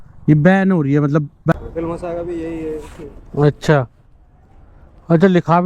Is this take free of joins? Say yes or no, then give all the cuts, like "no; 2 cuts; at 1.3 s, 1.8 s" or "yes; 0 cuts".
no; 1 cut; at 1.5 s